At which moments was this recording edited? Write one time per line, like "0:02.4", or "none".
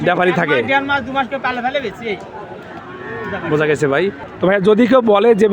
0:04.3